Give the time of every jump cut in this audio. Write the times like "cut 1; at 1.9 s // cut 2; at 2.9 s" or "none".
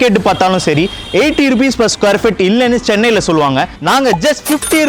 cut 1; at 3.7 s

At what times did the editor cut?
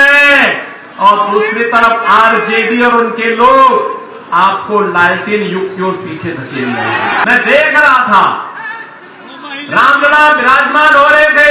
cut 1; at 7.2 s

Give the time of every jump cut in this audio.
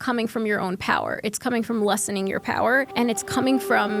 cut 1; at 2.9 s

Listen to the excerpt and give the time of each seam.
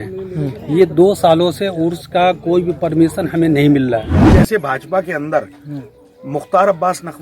cut 1; at 4.2 s

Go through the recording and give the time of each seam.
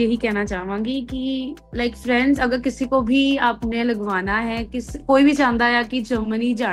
cut 1; at 1.6 s

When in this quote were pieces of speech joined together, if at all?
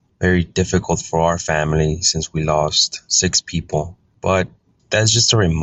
cut 1; at 4.0 s

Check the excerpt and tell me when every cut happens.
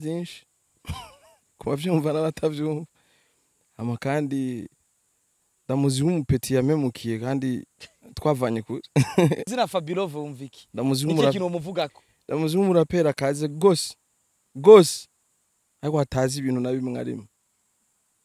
cut 1; at 9.5 s

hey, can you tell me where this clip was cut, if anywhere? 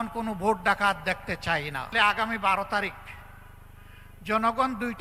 cut 1; at 1.9 s

